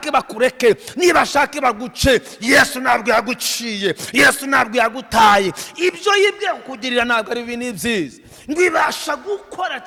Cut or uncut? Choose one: uncut